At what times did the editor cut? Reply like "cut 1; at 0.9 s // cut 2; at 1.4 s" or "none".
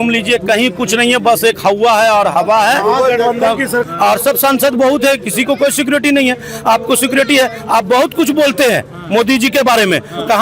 cut 1; at 3.9 s

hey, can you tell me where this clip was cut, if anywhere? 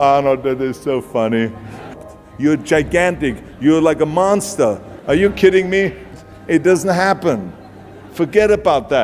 cut 1; at 1.9 s // cut 2; at 6.0 s

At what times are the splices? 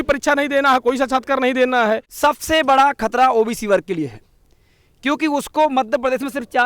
cut 1; at 2.1 s

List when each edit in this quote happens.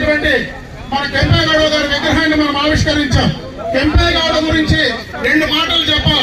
none

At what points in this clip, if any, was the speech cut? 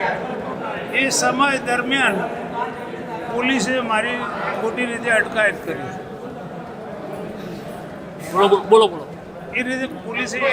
none

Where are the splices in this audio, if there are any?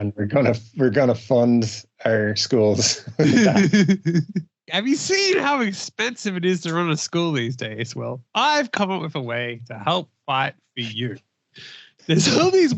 cut 1; at 4.6 s

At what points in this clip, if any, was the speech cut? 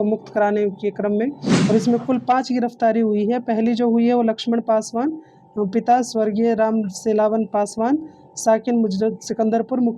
cut 1; at 1.5 s

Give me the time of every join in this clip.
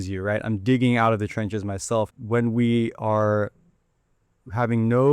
cut 1; at 2.2 s

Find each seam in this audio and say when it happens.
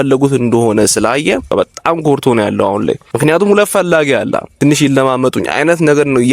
cut 1; at 1.5 s // cut 2; at 3.1 s // cut 3; at 4.5 s

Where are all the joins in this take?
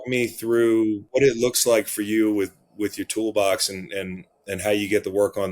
cut 1; at 1.0 s

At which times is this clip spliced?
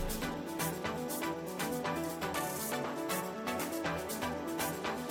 none

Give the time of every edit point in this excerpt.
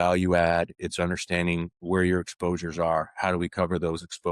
none

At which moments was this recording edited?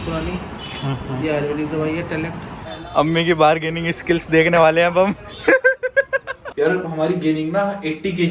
cut 1; at 2.5 s // cut 2; at 6.5 s

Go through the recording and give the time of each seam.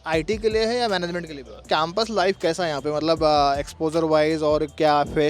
cut 1; at 1.7 s

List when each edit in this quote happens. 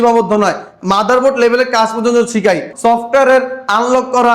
cut 1; at 2.7 s

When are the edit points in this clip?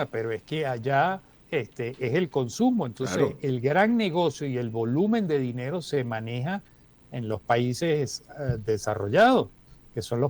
cut 1; at 1.3 s

